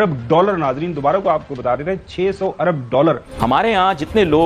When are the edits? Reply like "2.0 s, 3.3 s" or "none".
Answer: 3.3 s

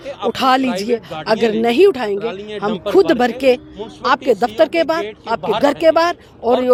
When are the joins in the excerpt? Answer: none

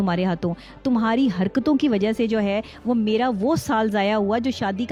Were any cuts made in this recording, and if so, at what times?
none

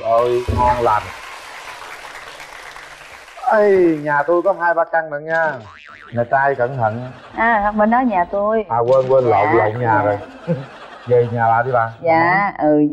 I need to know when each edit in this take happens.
none

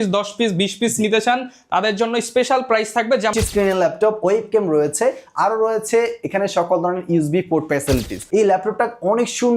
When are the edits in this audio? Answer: 3.3 s, 8.1 s

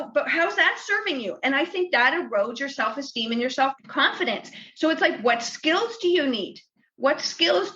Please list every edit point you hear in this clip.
3.8 s

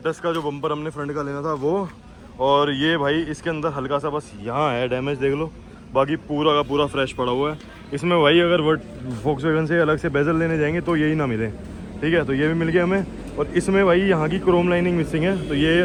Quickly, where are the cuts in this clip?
none

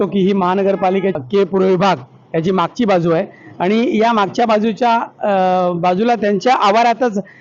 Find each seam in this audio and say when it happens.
1.2 s

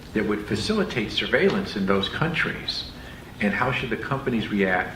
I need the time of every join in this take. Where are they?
1.9 s

